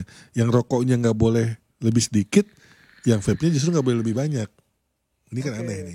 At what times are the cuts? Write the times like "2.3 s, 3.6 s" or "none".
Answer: none

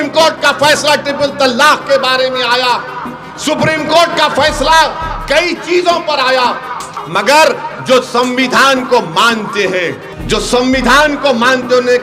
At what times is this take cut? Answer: 6.9 s, 10.1 s

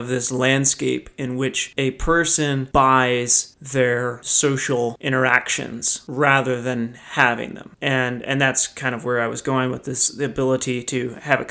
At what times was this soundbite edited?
none

